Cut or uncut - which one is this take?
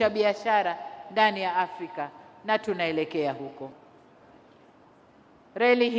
cut